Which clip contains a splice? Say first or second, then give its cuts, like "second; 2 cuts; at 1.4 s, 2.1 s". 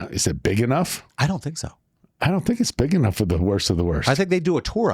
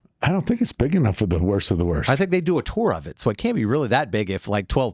first; 1 cut; at 1.0 s